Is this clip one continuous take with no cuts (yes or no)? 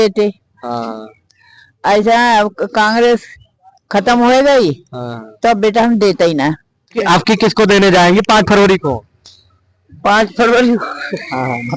no